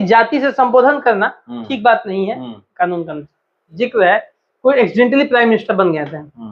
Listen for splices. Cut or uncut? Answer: cut